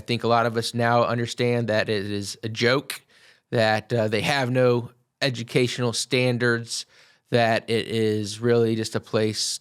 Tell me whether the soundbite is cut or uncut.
uncut